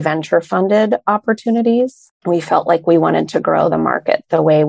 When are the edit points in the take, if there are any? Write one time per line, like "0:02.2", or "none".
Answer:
0:02.1